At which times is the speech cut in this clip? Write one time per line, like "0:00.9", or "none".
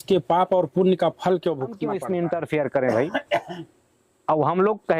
0:01.9